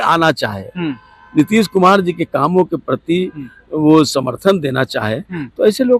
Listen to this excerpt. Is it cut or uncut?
uncut